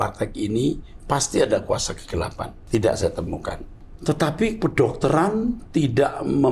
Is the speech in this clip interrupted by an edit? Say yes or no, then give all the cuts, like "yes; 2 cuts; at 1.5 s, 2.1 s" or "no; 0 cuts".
yes; 2 cuts; at 2.5 s, 3.7 s